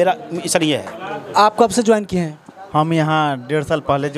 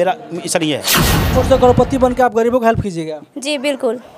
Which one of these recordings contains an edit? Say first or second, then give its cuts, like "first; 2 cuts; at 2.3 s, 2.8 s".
second; 1 cut; at 1.3 s